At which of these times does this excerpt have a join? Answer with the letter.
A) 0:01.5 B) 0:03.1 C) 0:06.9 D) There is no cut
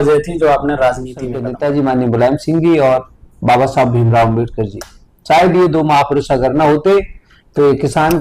A